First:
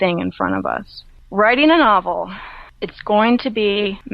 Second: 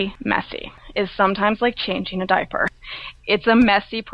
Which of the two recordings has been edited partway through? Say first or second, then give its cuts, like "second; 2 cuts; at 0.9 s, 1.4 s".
first; 1 cut; at 0.9 s